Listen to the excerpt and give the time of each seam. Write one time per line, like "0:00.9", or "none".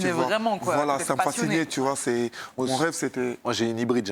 none